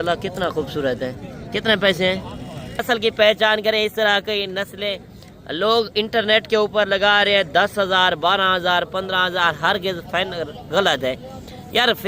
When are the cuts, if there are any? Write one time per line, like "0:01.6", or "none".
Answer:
0:01.3
0:02.8